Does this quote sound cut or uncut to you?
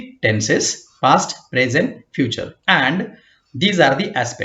cut